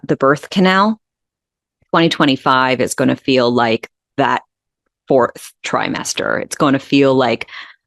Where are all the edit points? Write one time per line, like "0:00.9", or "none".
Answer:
none